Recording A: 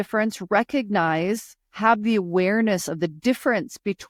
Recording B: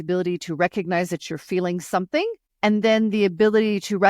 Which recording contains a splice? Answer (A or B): B